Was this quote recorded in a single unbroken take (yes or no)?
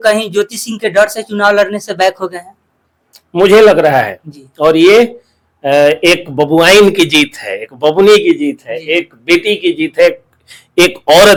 yes